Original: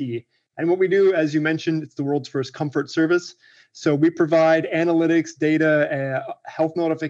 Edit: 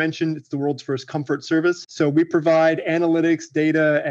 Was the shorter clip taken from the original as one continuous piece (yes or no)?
no